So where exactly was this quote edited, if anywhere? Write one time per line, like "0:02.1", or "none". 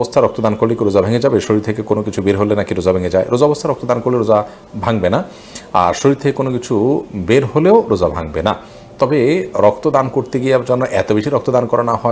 none